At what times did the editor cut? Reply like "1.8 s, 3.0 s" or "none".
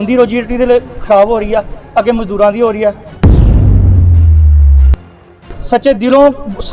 3.1 s, 5.5 s